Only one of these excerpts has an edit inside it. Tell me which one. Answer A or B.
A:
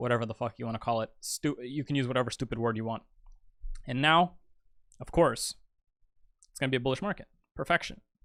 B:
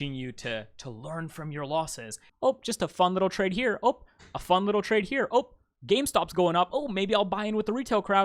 B